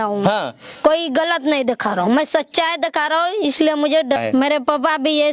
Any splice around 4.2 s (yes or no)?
yes